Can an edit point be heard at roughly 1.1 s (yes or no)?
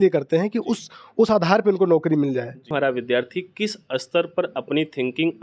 no